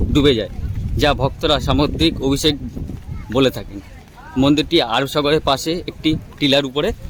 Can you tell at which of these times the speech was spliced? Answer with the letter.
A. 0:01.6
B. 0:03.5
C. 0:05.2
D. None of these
D